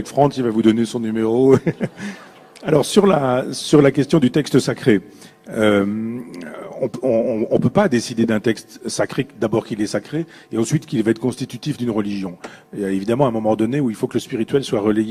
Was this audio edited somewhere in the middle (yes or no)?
yes